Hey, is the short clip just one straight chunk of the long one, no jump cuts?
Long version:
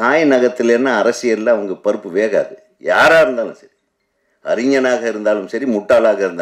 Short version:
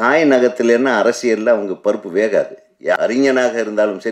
no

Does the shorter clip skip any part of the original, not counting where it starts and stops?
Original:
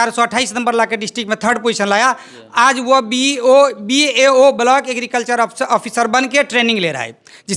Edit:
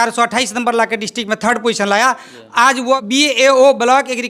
yes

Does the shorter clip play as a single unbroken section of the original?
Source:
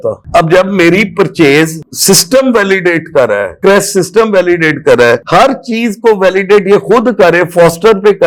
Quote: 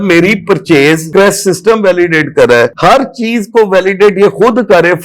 no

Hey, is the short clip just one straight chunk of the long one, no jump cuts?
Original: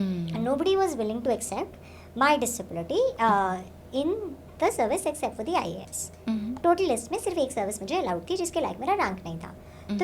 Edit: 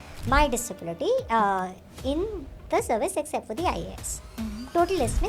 yes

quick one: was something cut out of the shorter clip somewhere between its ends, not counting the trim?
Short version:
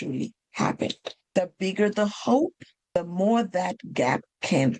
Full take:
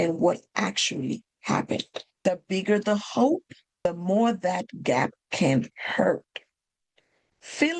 no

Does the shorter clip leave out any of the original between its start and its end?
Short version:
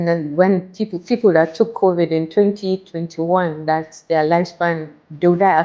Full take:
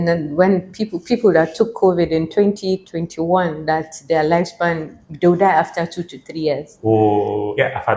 no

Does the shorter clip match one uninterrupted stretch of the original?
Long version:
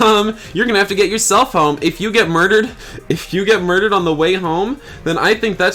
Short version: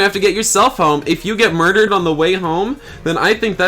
no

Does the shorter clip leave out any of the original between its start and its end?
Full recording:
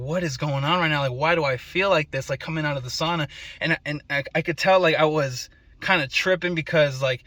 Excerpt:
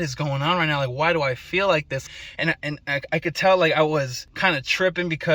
yes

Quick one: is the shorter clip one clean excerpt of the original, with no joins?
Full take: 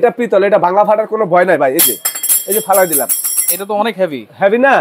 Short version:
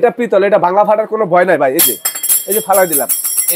yes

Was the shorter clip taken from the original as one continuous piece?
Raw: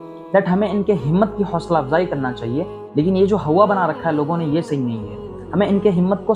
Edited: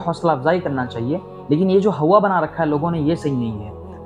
yes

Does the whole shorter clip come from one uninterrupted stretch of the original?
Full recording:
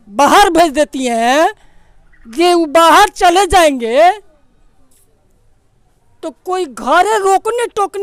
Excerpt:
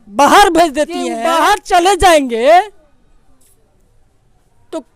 no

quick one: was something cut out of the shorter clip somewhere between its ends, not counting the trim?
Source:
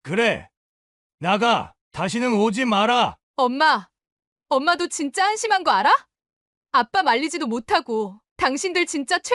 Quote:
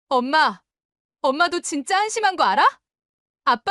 no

